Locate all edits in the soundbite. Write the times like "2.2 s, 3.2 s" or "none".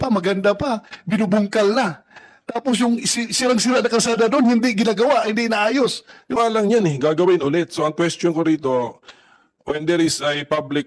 6.4 s